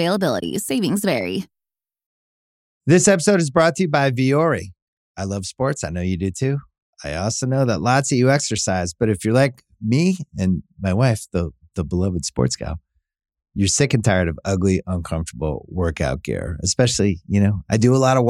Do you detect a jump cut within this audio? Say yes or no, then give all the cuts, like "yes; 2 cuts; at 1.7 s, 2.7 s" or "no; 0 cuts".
yes; 1 cut; at 2.1 s